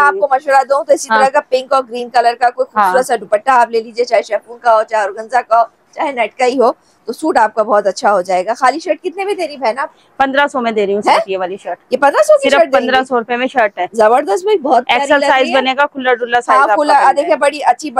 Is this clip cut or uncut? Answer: uncut